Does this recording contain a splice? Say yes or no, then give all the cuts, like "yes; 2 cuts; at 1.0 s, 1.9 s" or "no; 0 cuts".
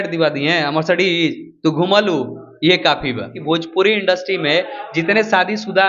yes; 1 cut; at 3.4 s